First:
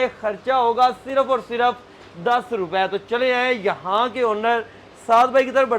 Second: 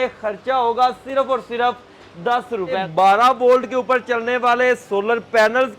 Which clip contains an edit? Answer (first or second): second